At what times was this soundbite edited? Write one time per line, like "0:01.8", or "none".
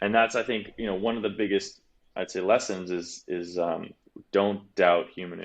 0:04.1